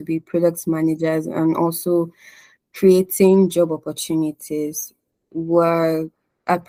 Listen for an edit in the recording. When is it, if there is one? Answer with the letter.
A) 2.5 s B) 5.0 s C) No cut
C